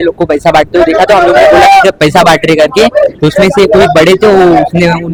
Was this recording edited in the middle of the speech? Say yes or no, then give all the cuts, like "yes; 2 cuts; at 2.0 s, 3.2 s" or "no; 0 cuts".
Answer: no; 0 cuts